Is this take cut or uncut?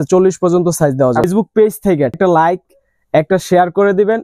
cut